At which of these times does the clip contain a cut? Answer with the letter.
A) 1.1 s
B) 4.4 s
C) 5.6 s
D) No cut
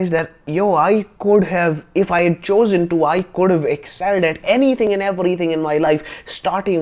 B